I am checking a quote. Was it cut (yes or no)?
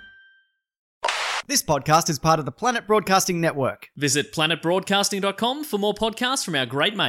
yes